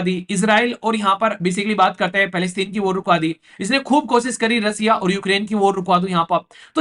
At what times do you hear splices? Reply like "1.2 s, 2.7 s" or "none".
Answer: none